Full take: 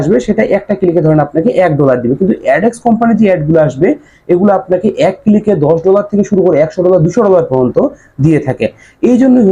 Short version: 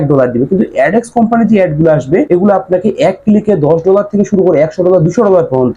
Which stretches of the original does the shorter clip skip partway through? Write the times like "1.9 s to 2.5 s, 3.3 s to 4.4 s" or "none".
4.0 s to 4.3 s